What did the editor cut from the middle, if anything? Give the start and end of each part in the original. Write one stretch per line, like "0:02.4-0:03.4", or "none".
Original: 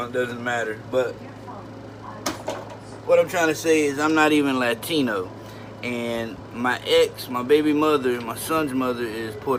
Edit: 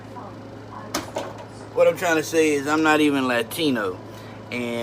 none